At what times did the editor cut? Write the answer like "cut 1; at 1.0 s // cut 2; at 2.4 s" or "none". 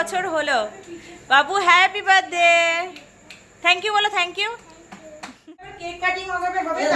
cut 1; at 5.8 s